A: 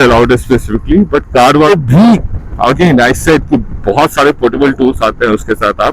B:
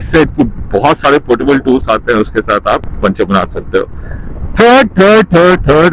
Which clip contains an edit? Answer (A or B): A